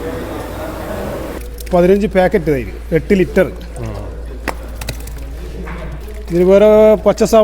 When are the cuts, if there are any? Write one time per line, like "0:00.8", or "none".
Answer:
0:01.4
0:06.0